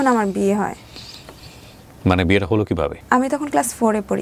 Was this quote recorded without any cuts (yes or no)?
yes